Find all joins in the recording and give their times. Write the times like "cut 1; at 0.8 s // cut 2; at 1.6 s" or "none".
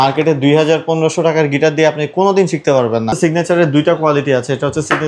cut 1; at 3.1 s